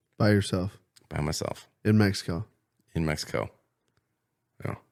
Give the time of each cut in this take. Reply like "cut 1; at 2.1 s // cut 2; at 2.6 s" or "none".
none